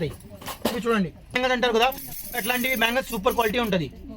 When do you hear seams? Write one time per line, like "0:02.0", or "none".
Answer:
0:01.4